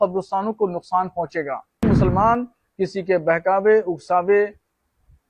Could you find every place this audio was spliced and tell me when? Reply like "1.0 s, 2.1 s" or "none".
1.8 s

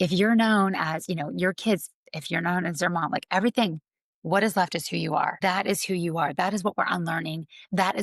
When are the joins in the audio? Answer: 5.3 s

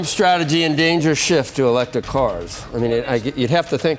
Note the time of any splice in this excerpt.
none

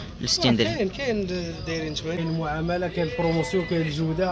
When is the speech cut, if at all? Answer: 2.2 s

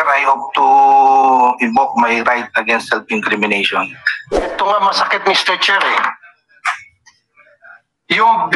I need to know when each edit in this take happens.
4.5 s

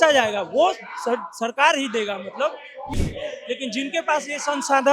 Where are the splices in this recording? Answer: 3.0 s

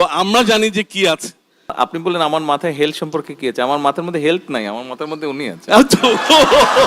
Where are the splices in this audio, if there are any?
1.7 s

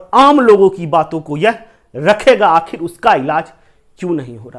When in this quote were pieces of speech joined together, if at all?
none

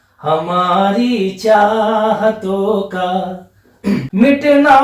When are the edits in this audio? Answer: 3.8 s

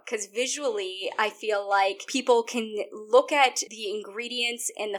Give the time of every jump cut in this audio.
2.1 s, 3.7 s

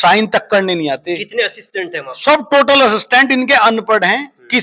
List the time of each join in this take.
none

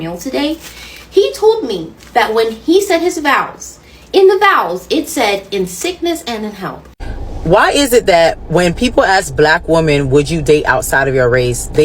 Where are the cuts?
6.8 s

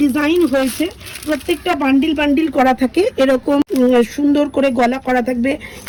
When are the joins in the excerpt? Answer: none

